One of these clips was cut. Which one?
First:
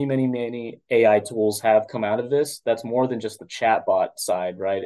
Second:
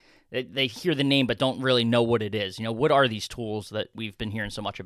second; 1 cut; at 3.9 s

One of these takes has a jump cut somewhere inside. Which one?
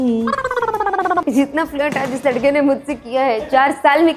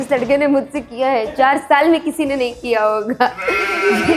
first; 1 cut; at 1.2 s

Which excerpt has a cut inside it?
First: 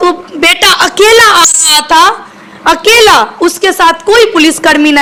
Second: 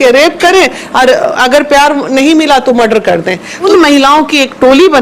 second; 1 cut; at 3.6 s

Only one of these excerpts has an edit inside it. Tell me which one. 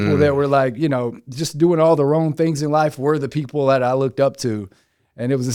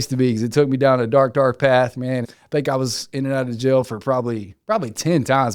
second; 1 cut; at 2.3 s

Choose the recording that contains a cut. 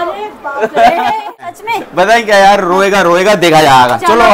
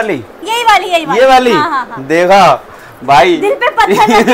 first; 1 cut; at 1.5 s

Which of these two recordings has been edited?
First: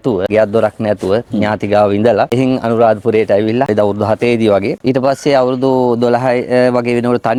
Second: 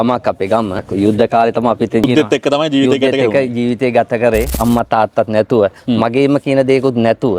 second; 3 cuts; at 0.8 s, 2.1 s, 4.5 s

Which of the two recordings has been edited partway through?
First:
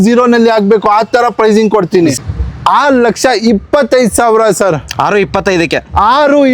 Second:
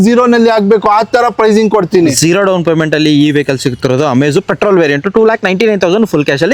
first; 1 cut; at 2.2 s

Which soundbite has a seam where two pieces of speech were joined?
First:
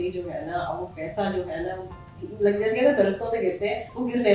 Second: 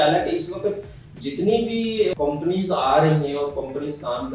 second; 1 cut; at 2.1 s

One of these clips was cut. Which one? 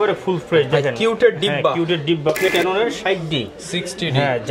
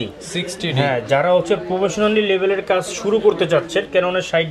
first; 1 cut; at 2.5 s

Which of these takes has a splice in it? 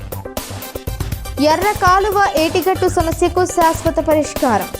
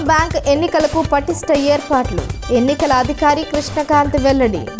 first; 1 cut; at 1.0 s

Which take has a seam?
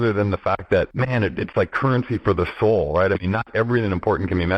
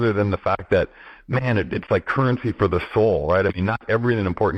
first; 1 cut; at 0.9 s

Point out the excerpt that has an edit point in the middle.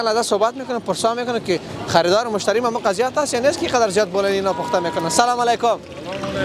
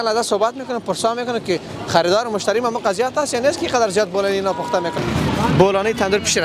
second; 1 cut; at 5.0 s

